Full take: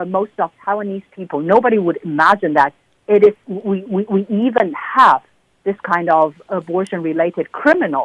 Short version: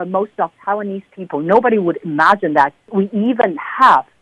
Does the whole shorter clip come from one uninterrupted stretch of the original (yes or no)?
no